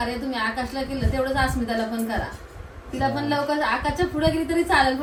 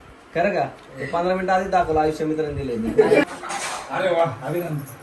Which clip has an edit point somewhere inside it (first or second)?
second